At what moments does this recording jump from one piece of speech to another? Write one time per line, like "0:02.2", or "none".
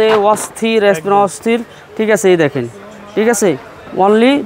none